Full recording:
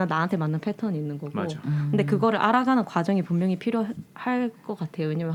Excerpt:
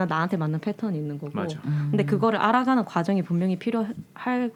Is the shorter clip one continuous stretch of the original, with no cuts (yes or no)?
yes